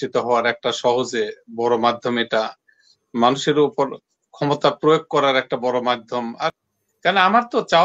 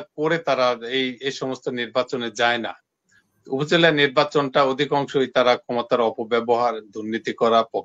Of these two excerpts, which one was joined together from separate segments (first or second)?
first